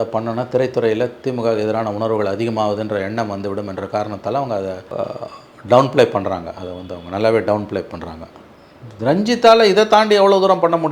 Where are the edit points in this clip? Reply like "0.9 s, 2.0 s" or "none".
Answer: 4.9 s